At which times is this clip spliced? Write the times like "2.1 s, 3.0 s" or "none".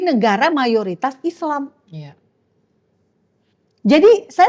none